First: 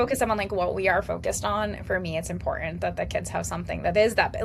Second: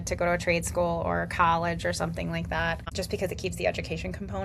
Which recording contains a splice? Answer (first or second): second